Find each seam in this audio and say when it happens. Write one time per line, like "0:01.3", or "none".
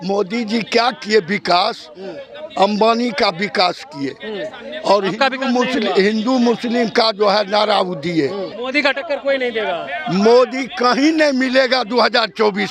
0:08.6